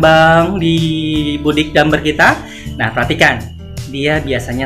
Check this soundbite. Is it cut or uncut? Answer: uncut